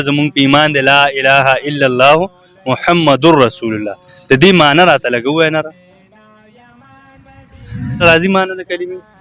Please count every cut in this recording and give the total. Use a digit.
1